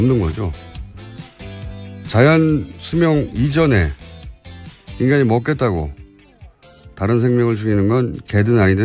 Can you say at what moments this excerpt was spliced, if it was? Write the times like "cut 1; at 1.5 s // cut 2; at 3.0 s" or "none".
cut 1; at 6.2 s